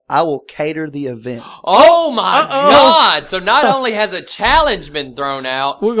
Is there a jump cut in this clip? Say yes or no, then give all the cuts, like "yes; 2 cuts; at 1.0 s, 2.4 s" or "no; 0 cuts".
no; 0 cuts